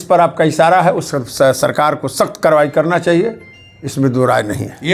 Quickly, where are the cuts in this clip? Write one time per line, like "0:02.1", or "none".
none